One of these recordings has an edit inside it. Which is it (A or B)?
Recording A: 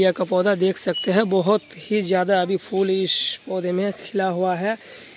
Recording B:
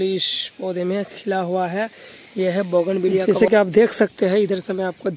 B